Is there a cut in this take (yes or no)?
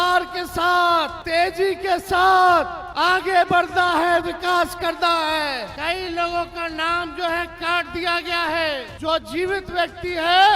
yes